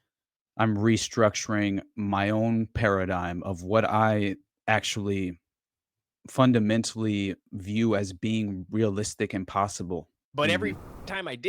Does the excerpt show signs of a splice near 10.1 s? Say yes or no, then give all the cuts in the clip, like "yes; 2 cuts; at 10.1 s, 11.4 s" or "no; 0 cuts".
yes; 1 cut; at 10.1 s